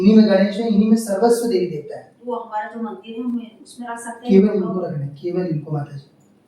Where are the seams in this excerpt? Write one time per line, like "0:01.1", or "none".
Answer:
none

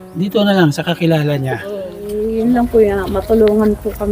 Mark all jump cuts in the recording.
0:02.1

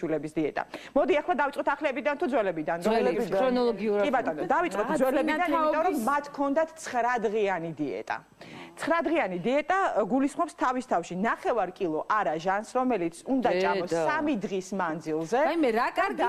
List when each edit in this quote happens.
0:02.8

